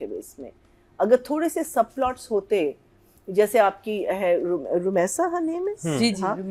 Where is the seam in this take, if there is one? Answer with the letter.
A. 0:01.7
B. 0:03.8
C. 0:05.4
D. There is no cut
D